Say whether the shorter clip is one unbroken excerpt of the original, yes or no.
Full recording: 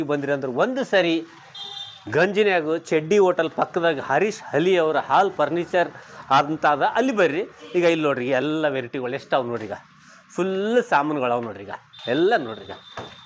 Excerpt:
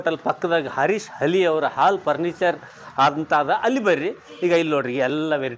yes